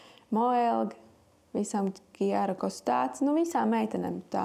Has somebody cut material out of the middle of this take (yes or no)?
no